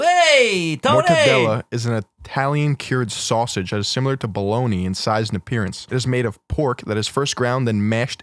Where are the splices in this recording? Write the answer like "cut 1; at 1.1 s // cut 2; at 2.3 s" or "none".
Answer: cut 1; at 5.8 s

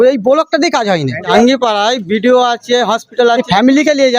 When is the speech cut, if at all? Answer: cut 1; at 1.3 s // cut 2; at 3.4 s

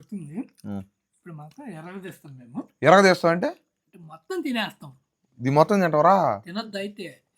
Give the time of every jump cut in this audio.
none

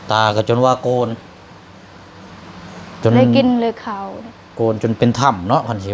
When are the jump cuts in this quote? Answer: none

